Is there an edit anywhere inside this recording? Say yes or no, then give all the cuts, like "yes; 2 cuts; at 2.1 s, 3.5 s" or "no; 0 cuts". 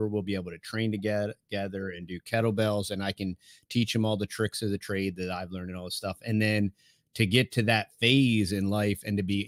no; 0 cuts